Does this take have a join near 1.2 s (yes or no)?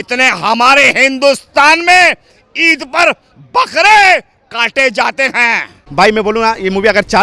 no